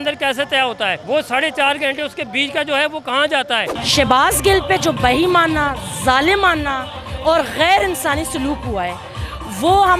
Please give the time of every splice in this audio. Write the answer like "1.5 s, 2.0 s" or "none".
1.0 s, 3.7 s